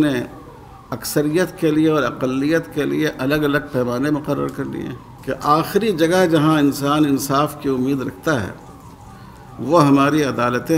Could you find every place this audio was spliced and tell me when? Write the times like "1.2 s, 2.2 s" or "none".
5.1 s